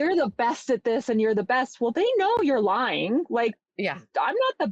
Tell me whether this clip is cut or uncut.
uncut